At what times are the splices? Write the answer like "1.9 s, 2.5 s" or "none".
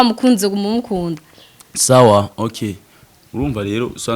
none